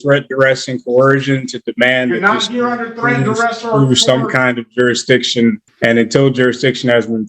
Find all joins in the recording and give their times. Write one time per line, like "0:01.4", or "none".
0:05.7